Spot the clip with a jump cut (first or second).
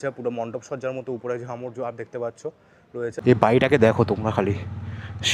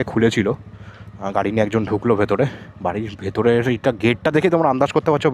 first